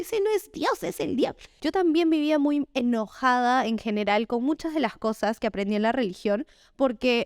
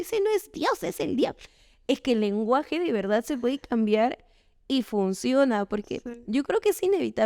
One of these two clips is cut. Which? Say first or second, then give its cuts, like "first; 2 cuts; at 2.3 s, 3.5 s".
first; 1 cut; at 1.5 s